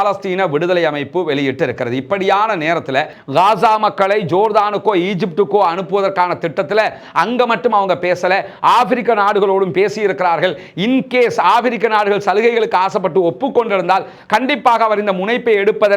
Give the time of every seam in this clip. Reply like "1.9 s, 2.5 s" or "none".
3.2 s